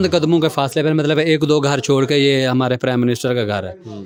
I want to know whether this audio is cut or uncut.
uncut